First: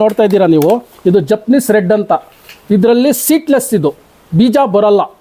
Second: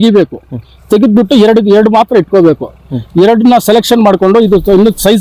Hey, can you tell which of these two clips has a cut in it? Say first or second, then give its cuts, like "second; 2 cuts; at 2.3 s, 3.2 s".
first; 1 cut; at 0.9 s